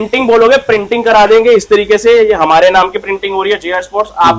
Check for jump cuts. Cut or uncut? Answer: uncut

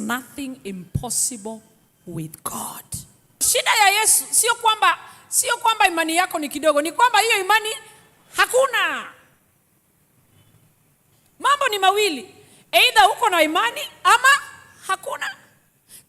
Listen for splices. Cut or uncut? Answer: cut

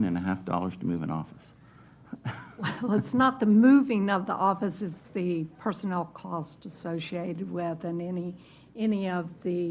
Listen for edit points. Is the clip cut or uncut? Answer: uncut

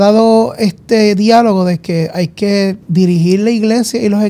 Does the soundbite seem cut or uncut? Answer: cut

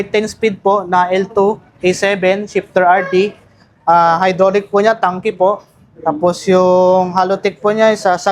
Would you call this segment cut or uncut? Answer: uncut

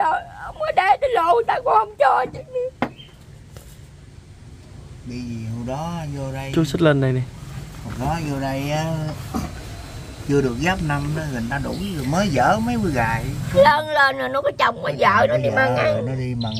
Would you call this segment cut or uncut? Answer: cut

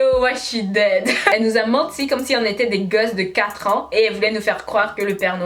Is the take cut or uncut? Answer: cut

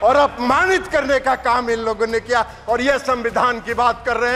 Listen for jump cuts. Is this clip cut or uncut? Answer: uncut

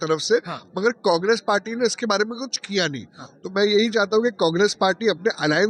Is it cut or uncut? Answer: uncut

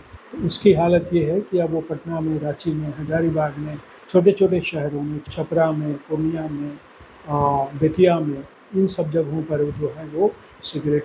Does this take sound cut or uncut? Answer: uncut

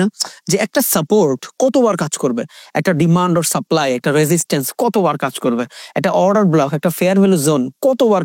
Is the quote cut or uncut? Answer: uncut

